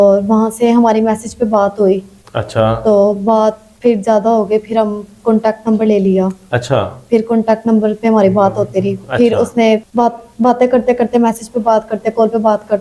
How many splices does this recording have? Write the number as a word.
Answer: zero